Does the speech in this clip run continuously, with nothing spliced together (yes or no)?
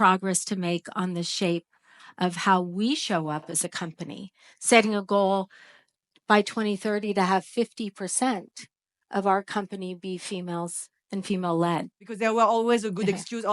no